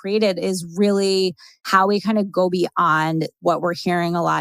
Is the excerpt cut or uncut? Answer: cut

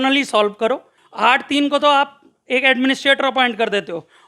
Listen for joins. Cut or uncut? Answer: cut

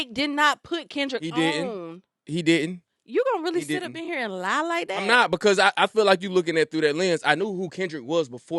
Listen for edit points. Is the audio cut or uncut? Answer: uncut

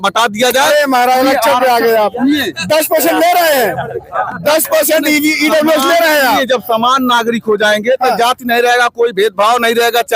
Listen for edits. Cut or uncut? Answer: uncut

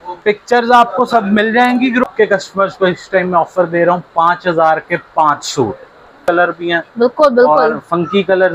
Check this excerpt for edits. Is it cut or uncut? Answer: cut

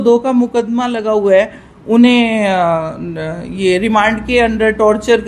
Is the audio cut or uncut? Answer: uncut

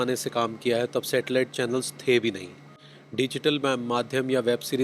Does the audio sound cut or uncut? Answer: uncut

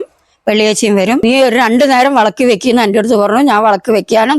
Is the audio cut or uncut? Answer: cut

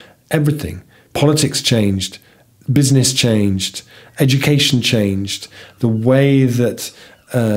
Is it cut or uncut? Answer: uncut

